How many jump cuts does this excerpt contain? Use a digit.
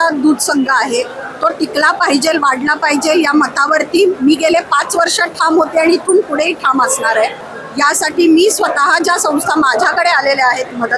1